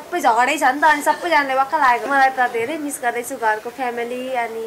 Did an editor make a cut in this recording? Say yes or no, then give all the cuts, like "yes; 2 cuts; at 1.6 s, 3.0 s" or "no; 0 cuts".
yes; 1 cut; at 2.1 s